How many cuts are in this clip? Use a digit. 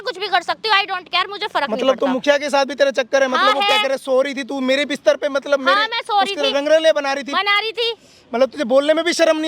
0